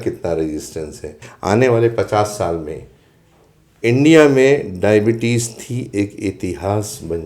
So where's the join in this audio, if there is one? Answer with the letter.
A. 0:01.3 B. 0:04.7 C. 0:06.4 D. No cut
A